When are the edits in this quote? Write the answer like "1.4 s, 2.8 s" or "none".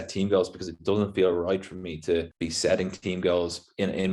2.4 s